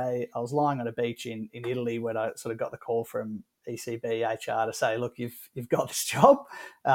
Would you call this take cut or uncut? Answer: uncut